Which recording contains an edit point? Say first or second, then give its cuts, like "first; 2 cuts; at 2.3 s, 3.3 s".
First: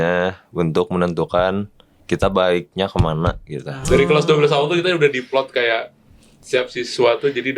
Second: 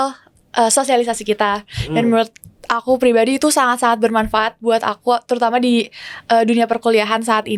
first; 1 cut; at 3.7 s